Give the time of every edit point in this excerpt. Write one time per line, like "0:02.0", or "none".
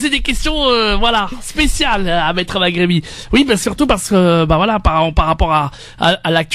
0:01.2

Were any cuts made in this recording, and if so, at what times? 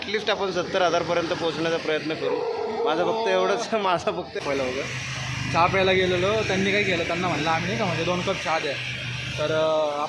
0:04.4

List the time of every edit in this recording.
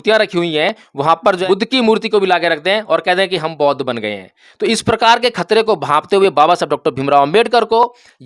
0:01.4

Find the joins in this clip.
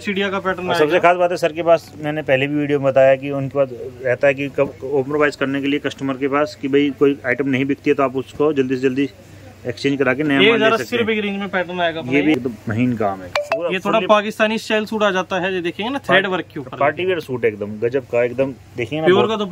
0:12.3

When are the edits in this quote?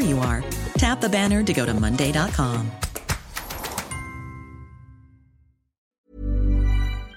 0:06.0

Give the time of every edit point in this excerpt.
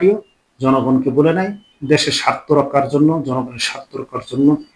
0:01.7

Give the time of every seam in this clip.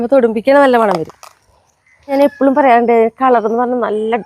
0:02.1

